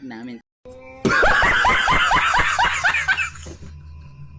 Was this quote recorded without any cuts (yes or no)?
yes